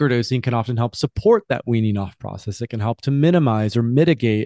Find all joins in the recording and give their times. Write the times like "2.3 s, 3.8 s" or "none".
none